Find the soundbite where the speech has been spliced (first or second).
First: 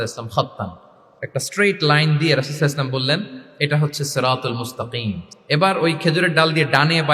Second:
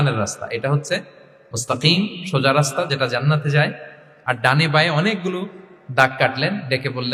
first